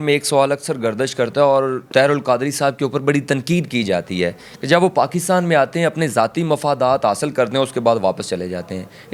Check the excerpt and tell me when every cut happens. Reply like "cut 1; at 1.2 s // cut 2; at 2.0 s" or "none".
none